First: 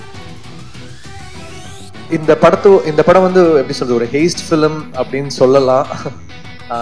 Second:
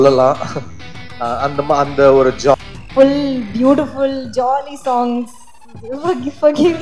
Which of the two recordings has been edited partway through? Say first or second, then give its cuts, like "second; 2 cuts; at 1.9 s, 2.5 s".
second; 1 cut; at 2.5 s